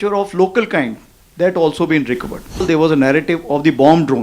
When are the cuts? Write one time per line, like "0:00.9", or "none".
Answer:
0:02.6